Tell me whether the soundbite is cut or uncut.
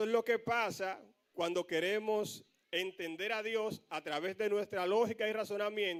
uncut